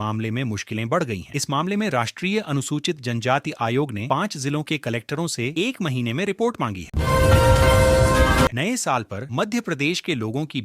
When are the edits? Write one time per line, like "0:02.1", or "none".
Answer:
none